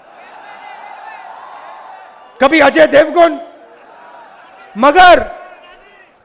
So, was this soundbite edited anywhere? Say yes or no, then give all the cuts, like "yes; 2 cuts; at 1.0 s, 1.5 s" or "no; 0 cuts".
no; 0 cuts